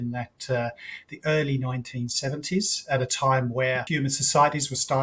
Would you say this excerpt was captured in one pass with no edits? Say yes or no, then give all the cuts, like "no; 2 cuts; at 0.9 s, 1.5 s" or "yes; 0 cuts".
no; 1 cut; at 3.9 s